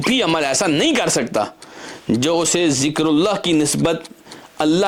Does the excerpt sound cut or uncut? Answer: uncut